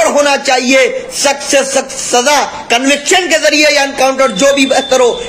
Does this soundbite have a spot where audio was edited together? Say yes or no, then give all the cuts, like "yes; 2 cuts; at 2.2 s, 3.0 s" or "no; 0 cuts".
no; 0 cuts